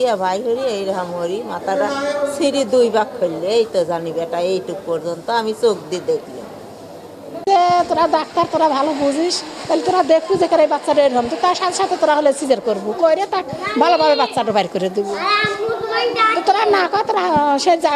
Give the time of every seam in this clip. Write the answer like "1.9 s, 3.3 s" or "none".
7.2 s